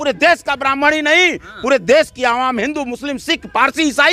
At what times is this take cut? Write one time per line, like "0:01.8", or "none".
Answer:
none